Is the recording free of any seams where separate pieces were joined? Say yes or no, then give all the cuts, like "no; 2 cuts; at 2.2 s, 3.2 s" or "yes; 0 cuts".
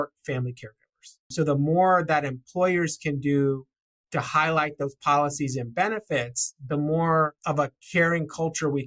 no; 2 cuts; at 1.3 s, 7.4 s